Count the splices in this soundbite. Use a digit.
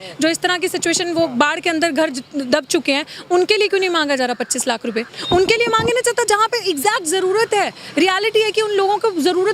1